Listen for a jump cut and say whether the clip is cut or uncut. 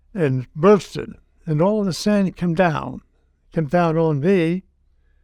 uncut